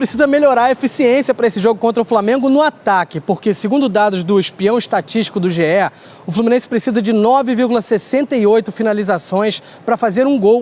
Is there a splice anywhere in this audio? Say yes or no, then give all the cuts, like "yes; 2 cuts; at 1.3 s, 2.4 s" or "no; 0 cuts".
no; 0 cuts